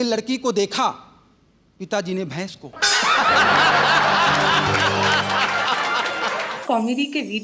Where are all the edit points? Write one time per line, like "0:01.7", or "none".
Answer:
0:06.5